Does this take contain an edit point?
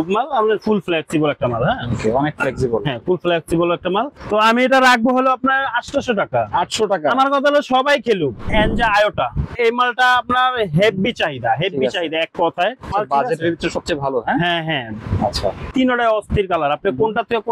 yes; 5 cuts; at 4.2 s, 8.5 s, 9.5 s, 12.9 s, 15.6 s

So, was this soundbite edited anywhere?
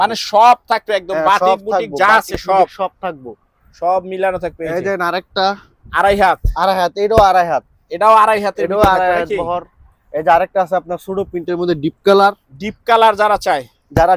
no; 0 cuts

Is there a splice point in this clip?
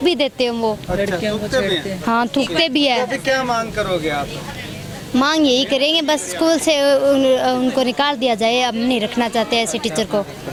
no; 0 cuts

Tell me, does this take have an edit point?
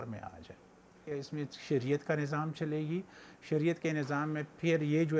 yes; 1 cut; at 1.0 s

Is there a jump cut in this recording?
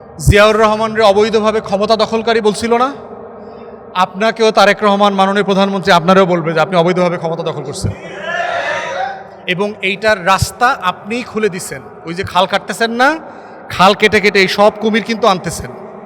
no; 0 cuts

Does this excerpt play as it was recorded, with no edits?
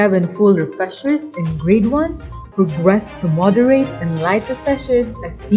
yes; 0 cuts

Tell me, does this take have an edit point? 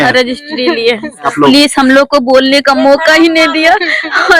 yes; 1 cut; at 1.3 s

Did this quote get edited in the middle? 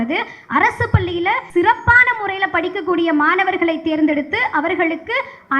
yes; 1 cut; at 1.4 s

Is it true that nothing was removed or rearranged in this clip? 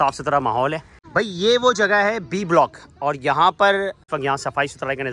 no; 2 cuts; at 0.9 s, 4.1 s

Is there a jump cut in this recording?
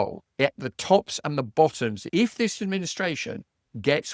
yes; 1 cut; at 2.0 s

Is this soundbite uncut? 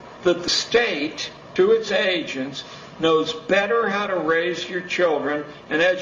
yes; 0 cuts

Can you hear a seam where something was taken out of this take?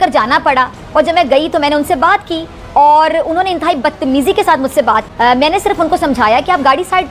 yes; 1 cut; at 5.1 s

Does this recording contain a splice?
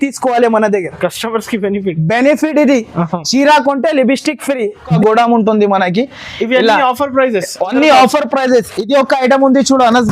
yes; 1 cut; at 4.9 s

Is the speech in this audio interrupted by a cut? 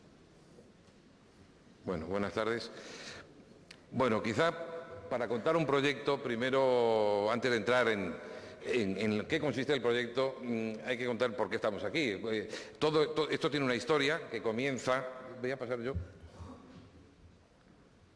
yes; 1 cut; at 1.3 s

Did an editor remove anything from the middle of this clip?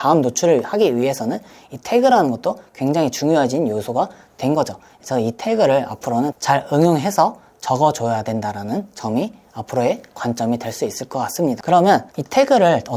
no; 0 cuts

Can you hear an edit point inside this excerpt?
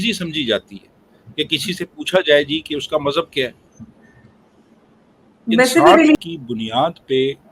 yes; 1 cut; at 6.1 s

